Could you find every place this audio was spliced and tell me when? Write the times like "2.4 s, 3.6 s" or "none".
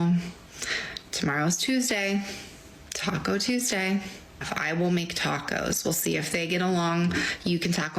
4.4 s